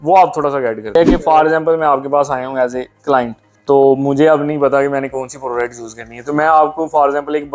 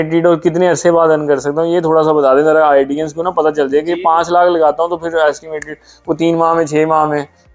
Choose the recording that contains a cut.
first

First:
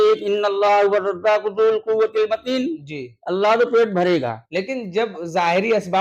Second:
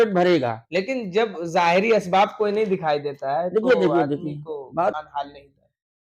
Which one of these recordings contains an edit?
second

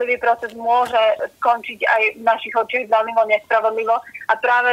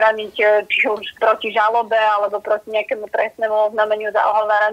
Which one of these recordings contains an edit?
second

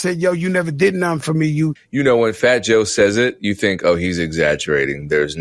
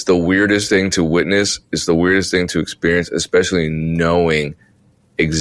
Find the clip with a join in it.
first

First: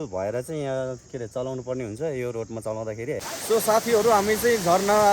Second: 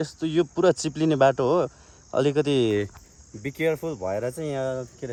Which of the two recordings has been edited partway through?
first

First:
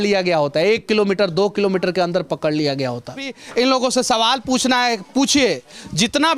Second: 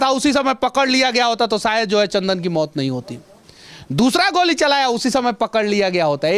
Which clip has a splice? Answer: first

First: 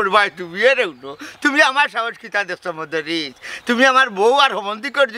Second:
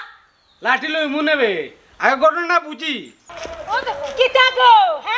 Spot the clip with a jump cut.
second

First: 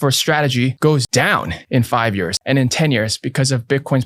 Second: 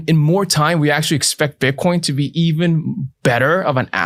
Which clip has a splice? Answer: first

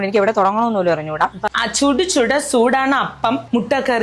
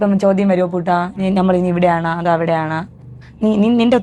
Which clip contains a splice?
first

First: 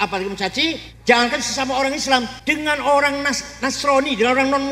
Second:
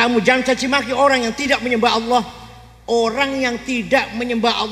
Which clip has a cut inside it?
first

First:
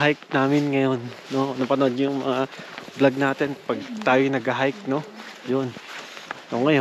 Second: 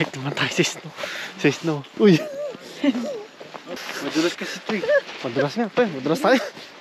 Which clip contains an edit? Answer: second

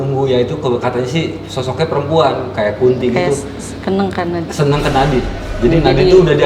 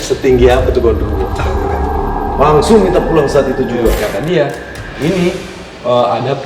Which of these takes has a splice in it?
second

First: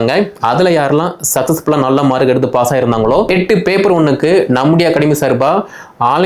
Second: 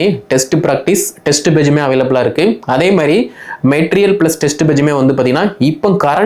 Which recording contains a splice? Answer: first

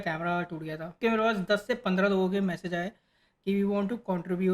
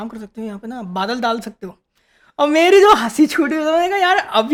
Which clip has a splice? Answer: first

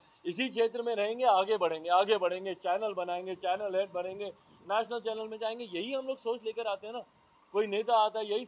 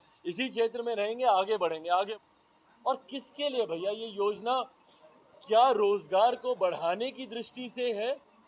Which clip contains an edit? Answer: second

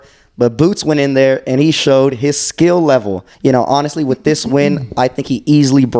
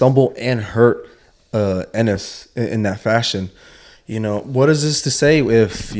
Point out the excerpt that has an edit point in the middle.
first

